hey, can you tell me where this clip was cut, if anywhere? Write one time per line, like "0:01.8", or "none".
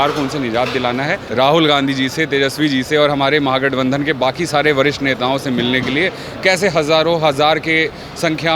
0:01.2